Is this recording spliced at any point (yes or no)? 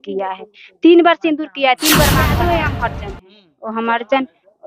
yes